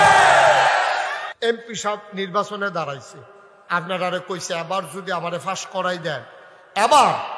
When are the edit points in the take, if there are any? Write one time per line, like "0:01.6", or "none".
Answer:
0:01.3